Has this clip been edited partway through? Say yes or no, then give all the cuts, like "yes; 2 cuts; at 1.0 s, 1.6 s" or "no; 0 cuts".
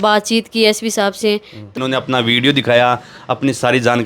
yes; 1 cut; at 1.8 s